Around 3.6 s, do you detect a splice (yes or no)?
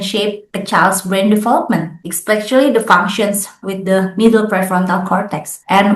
yes